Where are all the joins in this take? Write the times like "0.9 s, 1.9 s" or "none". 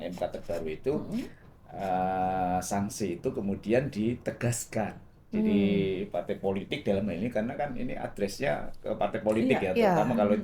none